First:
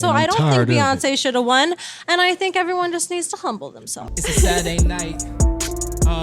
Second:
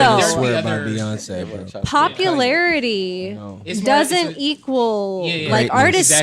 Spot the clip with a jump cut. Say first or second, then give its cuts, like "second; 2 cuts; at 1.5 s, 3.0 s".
first; 1 cut; at 4.0 s